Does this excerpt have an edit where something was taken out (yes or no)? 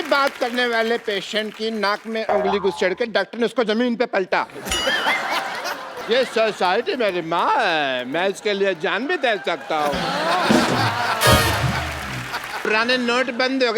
yes